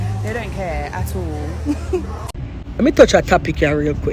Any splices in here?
yes; 1 cut; at 2.2 s

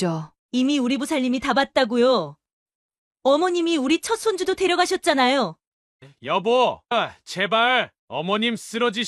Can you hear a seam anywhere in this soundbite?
yes; 1 cut; at 5.6 s

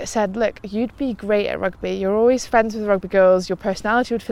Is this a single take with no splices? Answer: yes; 0 cuts

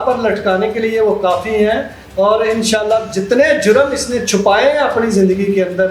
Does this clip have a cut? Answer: no; 0 cuts

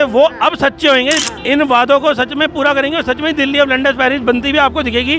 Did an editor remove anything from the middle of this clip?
yes; 1 cut; at 1.3 s

